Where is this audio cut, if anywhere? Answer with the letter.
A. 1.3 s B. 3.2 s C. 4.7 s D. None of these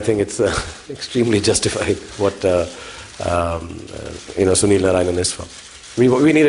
D